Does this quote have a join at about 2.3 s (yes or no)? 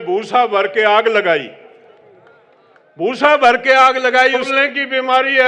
no